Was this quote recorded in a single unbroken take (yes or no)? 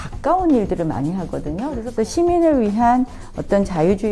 no